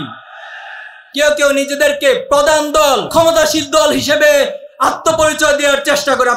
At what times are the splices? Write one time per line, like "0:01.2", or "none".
0:01.1
0:03.1